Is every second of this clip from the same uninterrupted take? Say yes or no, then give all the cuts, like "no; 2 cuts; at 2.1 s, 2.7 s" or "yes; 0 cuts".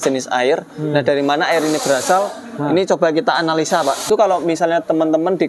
no; 1 cut; at 4.1 s